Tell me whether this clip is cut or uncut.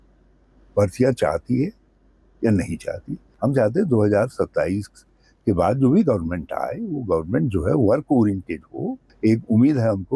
cut